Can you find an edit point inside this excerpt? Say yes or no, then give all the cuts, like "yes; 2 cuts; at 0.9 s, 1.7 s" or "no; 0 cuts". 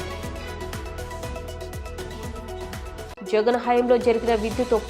no; 0 cuts